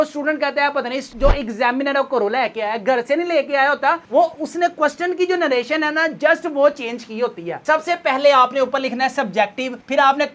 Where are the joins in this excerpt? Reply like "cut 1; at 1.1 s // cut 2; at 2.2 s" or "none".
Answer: cut 1; at 7.5 s